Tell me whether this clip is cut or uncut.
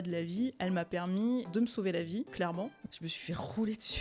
cut